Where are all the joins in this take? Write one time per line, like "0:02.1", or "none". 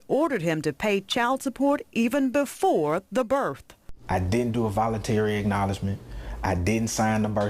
0:05.8